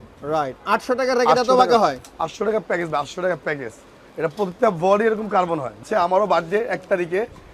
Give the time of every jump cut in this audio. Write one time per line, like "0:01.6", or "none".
0:05.8

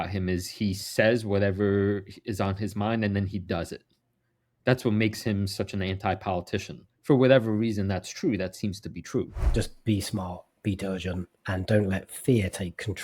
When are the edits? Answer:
0:09.4
0:11.3

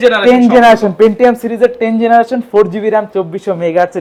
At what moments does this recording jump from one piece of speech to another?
none

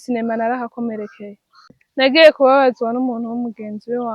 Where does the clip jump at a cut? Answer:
0:01.8

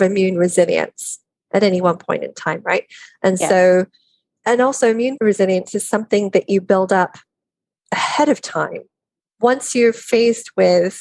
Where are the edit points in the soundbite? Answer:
0:04.4
0:05.2

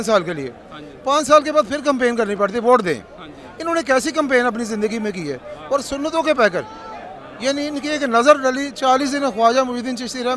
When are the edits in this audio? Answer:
none

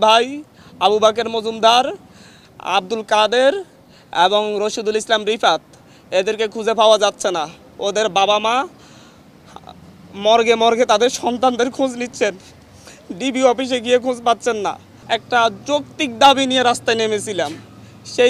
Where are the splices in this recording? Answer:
0:14.9

